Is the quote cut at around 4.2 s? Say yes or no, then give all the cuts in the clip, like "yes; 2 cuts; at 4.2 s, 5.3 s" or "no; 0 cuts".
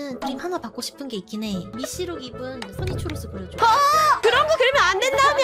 yes; 2 cuts; at 1.7 s, 4.2 s